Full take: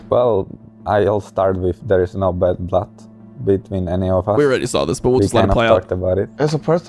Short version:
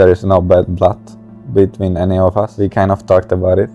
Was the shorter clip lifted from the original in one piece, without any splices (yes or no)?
no